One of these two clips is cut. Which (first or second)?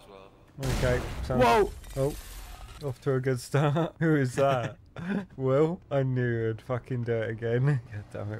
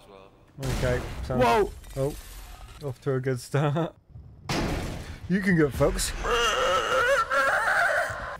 second